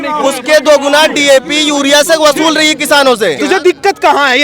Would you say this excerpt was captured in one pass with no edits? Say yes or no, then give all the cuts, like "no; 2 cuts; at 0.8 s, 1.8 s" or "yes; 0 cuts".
no; 1 cut; at 3.4 s